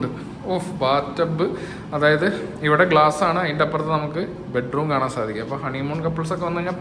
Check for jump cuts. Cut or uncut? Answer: uncut